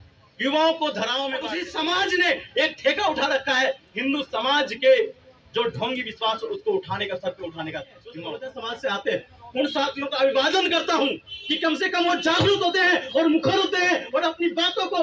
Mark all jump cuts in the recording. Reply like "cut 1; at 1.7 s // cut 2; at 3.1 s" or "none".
cut 1; at 1.6 s // cut 2; at 8.4 s